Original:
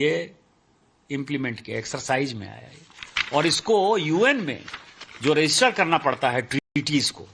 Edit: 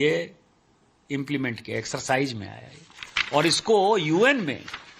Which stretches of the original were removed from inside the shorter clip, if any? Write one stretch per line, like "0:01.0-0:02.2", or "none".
none